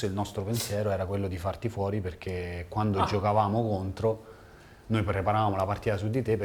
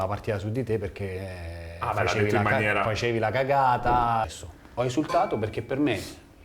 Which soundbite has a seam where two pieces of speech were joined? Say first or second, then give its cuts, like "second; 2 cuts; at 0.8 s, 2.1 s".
second; 1 cut; at 4.3 s